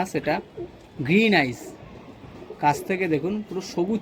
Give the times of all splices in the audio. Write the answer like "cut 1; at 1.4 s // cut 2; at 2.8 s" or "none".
none